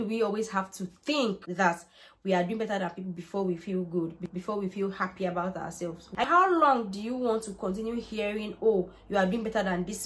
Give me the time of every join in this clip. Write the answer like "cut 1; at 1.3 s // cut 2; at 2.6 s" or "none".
cut 1; at 6.2 s